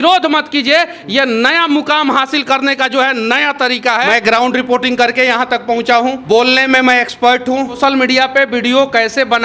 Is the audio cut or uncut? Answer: cut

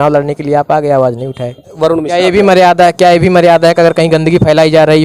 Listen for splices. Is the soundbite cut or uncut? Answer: cut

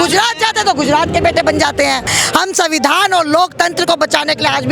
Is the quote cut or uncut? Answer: cut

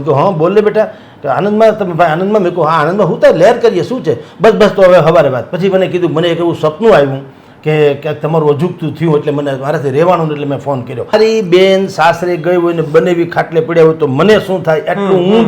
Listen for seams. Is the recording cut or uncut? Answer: cut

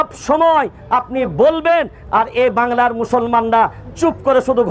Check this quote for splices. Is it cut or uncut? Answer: uncut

